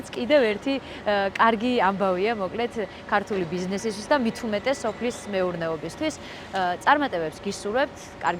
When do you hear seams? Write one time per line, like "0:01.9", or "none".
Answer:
none